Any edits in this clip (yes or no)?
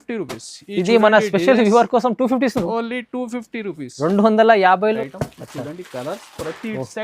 yes